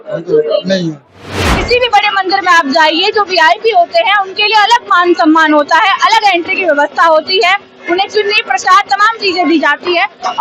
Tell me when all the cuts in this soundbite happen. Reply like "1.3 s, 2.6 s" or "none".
1.5 s